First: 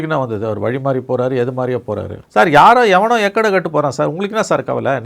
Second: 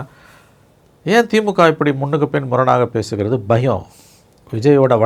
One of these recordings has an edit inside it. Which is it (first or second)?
first